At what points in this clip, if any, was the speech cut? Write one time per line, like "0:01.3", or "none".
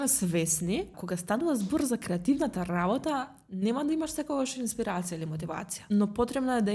0:01.1
0:05.7